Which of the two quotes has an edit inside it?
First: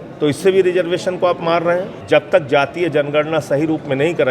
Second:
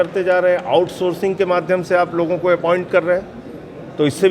first; 1 cut; at 1.9 s

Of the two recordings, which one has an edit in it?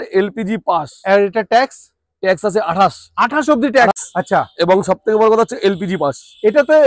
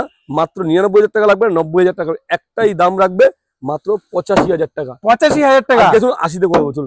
first; 1 cut; at 3.9 s

